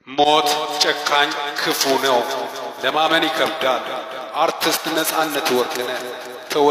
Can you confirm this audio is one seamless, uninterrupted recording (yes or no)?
yes